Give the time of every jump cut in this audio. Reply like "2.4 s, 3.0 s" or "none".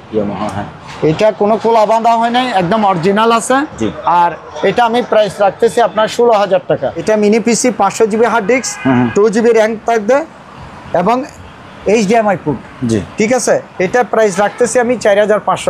7.0 s